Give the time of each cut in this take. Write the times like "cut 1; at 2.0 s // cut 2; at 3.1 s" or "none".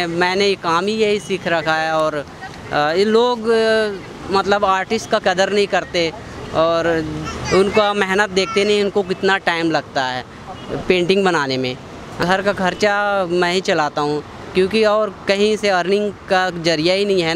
cut 1; at 12.2 s